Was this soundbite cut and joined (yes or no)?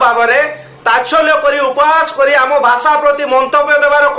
no